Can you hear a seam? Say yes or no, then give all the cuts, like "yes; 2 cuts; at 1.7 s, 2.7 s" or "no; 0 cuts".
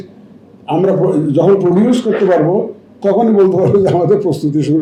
no; 0 cuts